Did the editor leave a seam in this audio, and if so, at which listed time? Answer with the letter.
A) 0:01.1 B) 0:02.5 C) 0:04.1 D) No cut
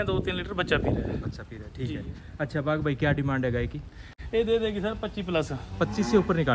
C